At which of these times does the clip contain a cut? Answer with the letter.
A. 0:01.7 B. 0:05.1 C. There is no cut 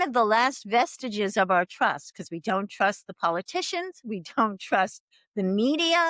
C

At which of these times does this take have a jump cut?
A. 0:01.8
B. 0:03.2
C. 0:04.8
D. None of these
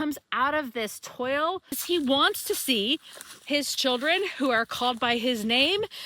A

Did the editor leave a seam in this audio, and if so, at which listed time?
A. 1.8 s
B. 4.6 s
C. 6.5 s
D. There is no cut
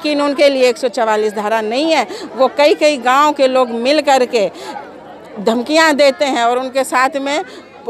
D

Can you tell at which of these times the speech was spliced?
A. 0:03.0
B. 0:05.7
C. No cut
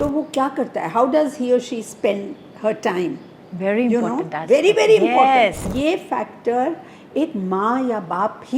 B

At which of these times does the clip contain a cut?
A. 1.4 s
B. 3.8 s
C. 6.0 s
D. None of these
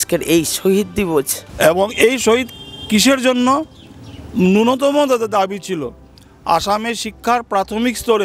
A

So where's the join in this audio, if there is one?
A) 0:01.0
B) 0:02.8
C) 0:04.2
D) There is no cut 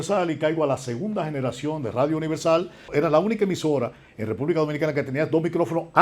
B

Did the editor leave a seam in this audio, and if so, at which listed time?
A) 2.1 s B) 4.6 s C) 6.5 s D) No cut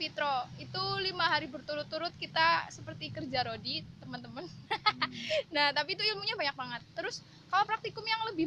D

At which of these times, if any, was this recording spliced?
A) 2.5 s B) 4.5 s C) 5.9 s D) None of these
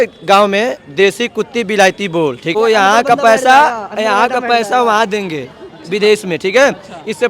A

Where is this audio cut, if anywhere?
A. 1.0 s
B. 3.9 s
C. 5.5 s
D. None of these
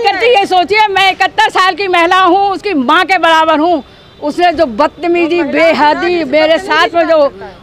B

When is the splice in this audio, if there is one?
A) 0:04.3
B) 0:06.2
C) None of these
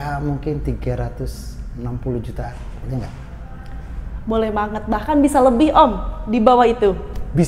C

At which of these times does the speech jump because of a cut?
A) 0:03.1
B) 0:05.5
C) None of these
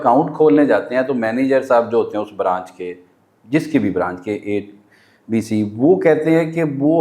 C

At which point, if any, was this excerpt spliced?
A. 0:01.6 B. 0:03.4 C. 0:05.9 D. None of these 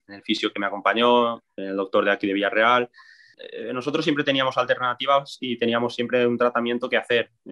B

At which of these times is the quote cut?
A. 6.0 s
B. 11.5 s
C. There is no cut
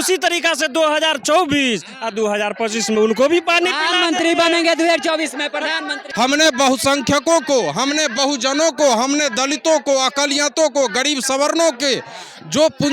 A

